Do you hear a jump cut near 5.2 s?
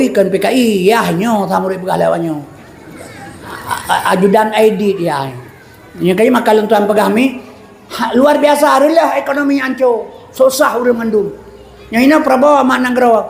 no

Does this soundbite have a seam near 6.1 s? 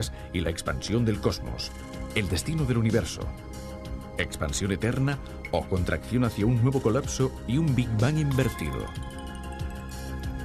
yes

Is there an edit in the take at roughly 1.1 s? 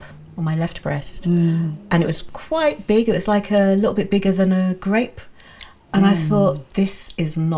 no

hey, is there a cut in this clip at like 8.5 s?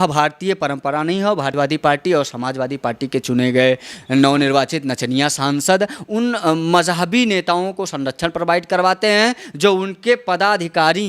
no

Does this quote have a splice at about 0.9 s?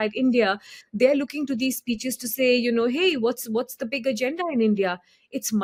no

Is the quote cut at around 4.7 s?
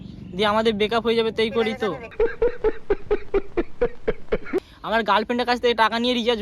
yes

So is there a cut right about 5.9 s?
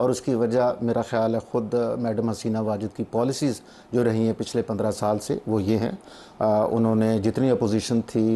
no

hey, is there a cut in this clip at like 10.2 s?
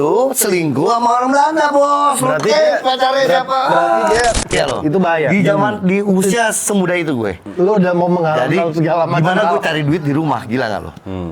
no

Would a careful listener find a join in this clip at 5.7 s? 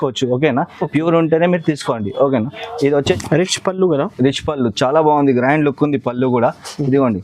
no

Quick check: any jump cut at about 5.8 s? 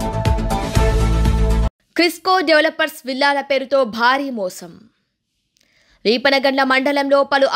no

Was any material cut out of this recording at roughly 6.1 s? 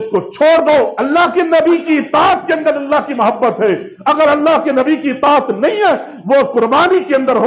no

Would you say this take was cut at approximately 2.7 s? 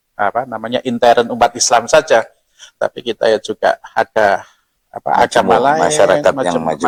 no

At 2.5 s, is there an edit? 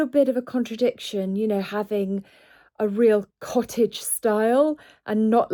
no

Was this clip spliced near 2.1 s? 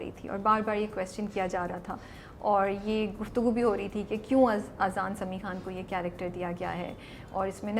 no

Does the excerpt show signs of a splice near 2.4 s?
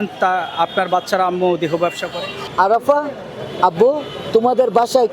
yes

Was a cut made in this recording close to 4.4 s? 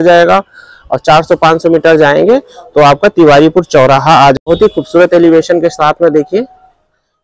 yes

